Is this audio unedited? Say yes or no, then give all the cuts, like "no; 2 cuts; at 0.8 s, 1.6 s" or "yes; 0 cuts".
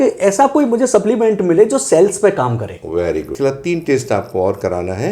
no; 1 cut; at 3.3 s